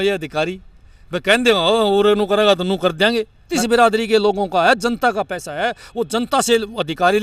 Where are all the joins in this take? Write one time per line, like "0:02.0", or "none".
0:03.5